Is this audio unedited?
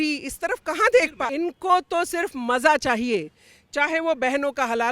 no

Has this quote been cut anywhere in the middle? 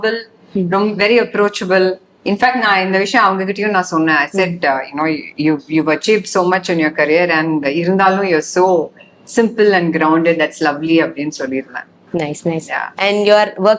no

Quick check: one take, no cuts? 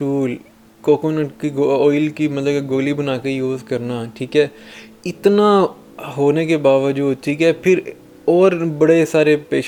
yes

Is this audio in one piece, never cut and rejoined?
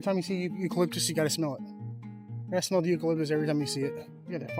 yes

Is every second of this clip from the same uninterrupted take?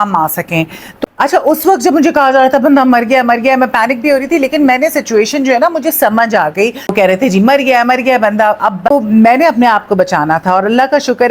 no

